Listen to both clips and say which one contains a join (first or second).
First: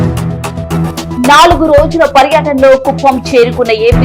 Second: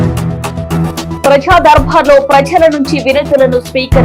first